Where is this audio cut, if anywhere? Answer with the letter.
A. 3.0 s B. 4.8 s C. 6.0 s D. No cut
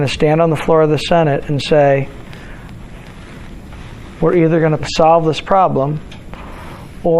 B